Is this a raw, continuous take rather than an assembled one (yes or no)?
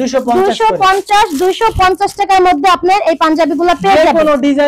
yes